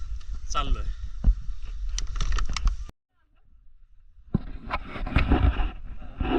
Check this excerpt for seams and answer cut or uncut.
uncut